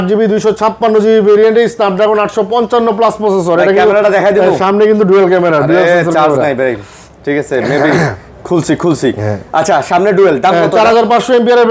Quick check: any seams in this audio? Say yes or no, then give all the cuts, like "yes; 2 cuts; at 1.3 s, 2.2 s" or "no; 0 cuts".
no; 0 cuts